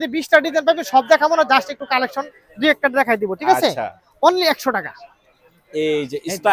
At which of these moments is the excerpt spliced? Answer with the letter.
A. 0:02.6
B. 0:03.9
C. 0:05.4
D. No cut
D